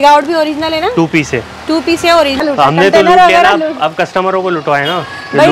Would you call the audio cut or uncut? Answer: cut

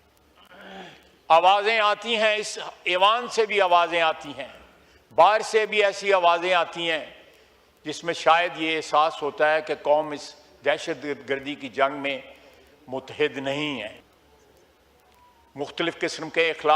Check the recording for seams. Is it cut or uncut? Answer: cut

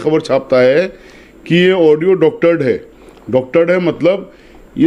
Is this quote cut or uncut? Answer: uncut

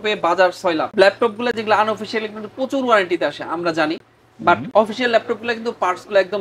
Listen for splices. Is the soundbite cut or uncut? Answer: uncut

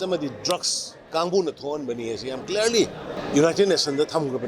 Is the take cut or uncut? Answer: cut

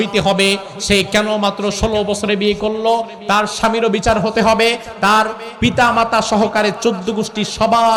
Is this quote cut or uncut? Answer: uncut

